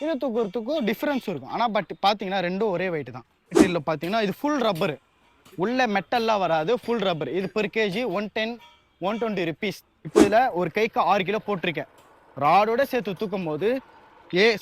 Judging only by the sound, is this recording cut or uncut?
cut